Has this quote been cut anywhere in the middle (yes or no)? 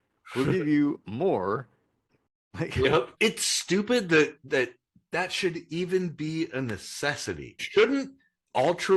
yes